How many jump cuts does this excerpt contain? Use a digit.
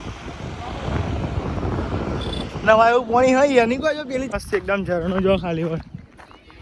1